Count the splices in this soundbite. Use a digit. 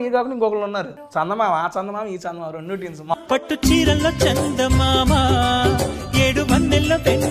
2